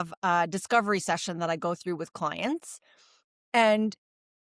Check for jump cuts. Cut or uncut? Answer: uncut